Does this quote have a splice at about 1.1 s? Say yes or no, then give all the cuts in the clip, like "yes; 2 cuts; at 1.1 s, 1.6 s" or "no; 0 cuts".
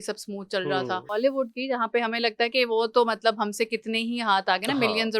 yes; 1 cut; at 1.1 s